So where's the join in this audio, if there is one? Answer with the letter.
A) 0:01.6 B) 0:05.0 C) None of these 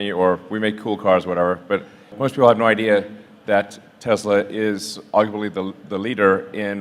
C